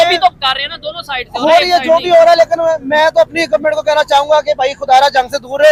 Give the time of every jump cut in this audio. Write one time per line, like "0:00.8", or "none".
none